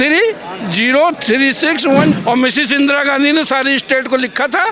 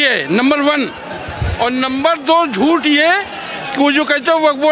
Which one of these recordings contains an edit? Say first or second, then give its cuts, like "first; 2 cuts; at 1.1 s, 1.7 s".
first; 1 cut; at 2.2 s